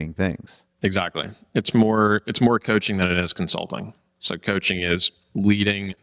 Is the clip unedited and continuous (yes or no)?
yes